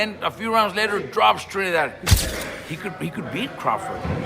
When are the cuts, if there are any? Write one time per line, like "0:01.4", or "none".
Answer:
0:02.2